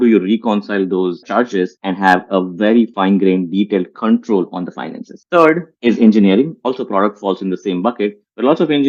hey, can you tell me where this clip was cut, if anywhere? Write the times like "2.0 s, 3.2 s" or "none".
1.4 s, 2.9 s, 5.7 s, 6.6 s